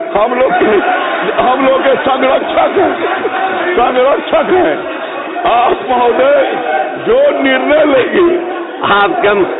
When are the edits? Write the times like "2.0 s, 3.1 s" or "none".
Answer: none

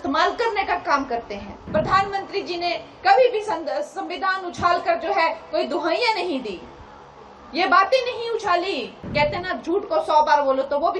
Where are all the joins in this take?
1.6 s, 9.0 s

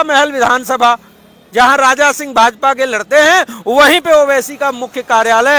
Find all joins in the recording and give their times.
none

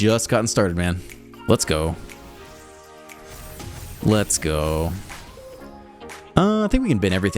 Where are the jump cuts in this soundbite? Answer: none

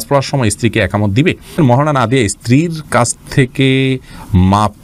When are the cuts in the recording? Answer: 1.6 s

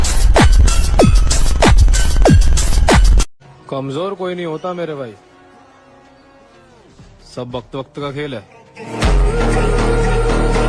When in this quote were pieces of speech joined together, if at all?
3.4 s

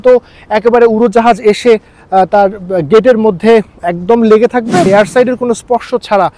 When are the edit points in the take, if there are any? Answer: 4.9 s

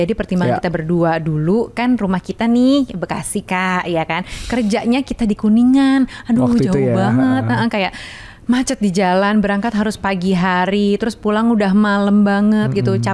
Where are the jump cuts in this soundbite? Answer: none

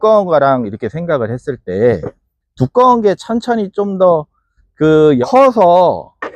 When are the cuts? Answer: 5.2 s

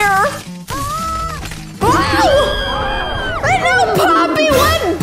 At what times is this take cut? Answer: none

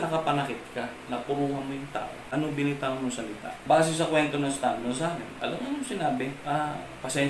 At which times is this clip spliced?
2.2 s, 3.5 s, 5.3 s, 6.4 s

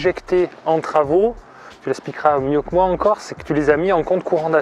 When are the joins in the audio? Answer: none

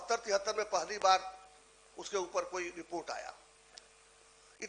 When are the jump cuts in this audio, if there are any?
none

